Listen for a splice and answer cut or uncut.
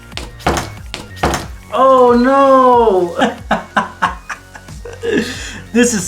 cut